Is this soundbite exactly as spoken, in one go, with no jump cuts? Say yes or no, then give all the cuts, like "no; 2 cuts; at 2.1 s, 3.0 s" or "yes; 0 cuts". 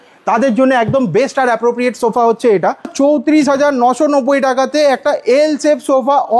no; 1 cut; at 2.9 s